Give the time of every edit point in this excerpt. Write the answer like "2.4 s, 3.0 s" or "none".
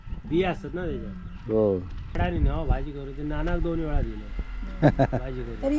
2.2 s